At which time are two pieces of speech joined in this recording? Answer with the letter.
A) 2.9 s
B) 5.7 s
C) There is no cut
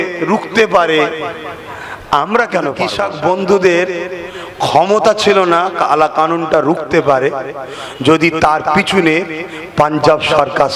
A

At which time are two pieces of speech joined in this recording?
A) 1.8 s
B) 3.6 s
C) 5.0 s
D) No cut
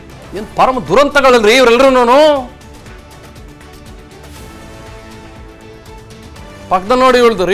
C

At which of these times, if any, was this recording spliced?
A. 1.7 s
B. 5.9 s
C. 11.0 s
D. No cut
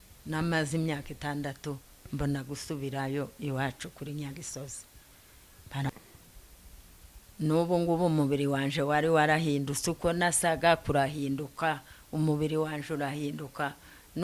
B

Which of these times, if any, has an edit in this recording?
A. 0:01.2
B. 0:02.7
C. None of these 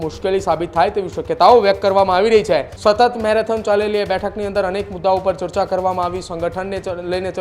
B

